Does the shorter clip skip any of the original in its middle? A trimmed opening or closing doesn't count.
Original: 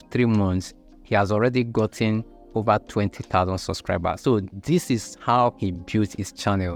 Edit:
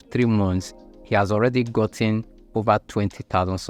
no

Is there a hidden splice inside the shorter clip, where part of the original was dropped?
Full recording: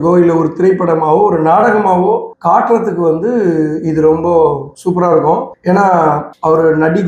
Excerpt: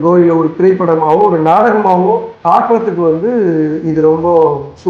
no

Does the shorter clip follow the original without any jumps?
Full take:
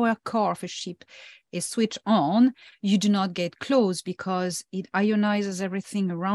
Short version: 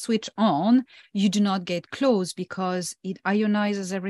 yes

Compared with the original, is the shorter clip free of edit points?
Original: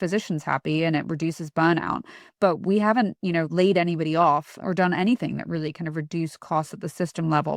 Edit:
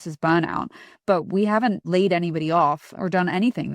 no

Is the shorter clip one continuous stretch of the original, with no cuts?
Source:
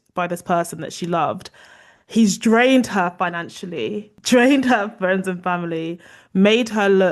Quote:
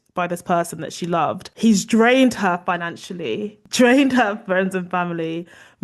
no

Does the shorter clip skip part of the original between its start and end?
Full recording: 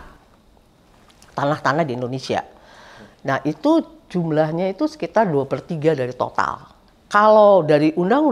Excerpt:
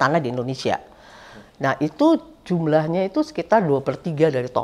no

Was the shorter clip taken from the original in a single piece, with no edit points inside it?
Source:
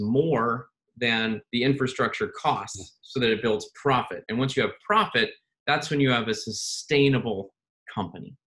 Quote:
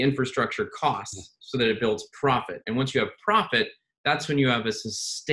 yes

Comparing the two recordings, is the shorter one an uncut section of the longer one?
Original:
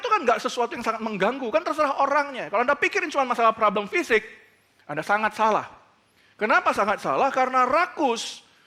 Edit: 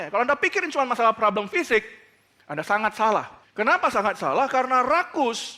no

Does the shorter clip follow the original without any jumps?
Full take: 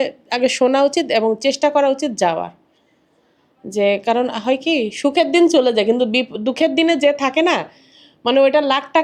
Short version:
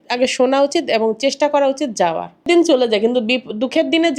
no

